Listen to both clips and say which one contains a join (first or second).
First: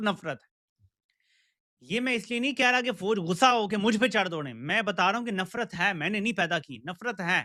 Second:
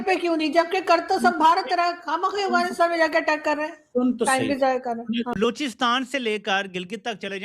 second